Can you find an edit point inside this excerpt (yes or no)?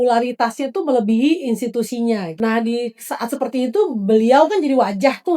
yes